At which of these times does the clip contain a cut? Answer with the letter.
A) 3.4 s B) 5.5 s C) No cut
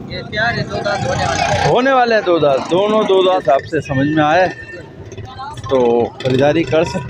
A